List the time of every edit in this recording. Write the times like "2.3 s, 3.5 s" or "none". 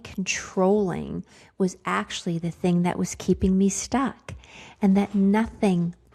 none

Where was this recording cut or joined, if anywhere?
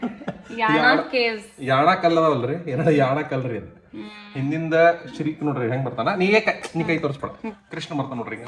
none

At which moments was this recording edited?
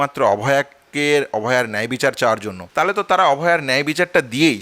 2.6 s

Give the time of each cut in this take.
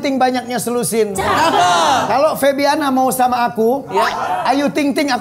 none

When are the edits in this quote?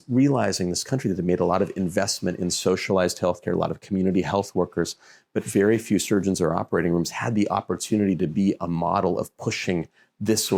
none

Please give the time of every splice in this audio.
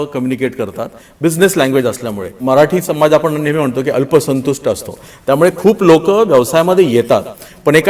2.4 s

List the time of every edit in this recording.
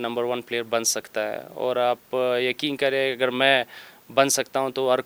none

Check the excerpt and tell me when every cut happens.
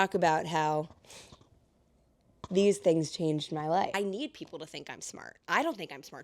3.9 s

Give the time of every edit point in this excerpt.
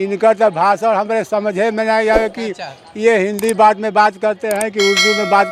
none

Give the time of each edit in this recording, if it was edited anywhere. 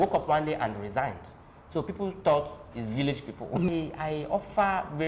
3.7 s

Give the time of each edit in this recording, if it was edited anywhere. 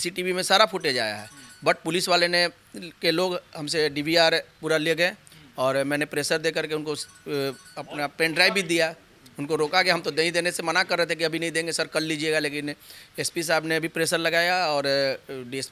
none

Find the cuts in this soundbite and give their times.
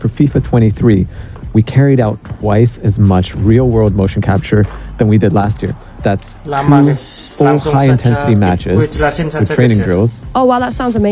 none

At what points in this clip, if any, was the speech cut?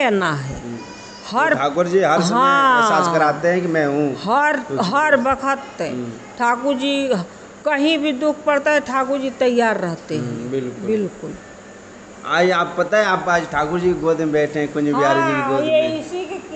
none

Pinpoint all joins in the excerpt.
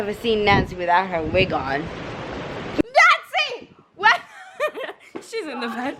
2.8 s

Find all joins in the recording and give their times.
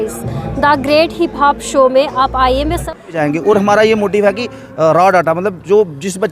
3.1 s

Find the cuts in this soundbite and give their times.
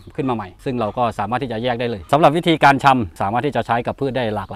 2.0 s

